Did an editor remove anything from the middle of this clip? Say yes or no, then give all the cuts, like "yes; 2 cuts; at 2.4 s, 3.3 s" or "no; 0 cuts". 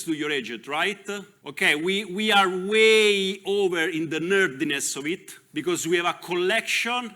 yes; 1 cut; at 1.4 s